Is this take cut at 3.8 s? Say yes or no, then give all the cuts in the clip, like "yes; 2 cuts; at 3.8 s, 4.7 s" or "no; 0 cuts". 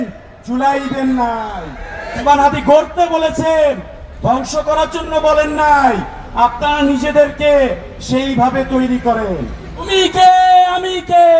no; 2 cuts; at 2.2 s, 9.9 s